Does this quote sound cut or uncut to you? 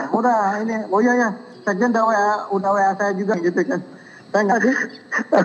cut